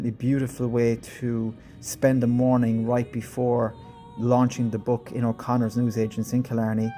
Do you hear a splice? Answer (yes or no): no